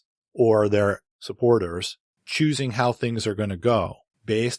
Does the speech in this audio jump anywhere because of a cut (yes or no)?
yes